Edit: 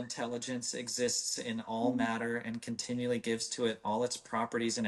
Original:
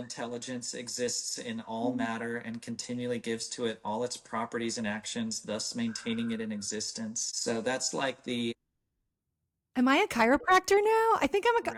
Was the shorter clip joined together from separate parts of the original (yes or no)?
no